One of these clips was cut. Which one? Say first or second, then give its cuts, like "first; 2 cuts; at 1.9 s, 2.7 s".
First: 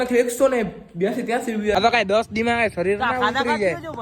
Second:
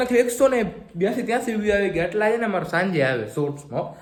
first; 1 cut; at 1.8 s